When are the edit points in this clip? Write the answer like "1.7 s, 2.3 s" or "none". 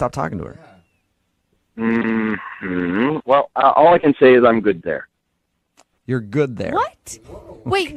none